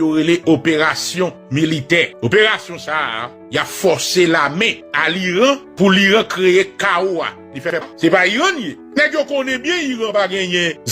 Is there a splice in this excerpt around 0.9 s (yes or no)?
no